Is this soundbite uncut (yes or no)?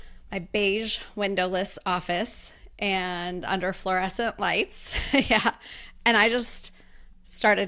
yes